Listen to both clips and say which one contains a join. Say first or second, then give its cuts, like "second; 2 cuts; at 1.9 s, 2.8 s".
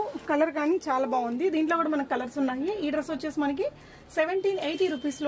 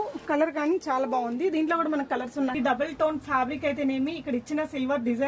second; 1 cut; at 2.5 s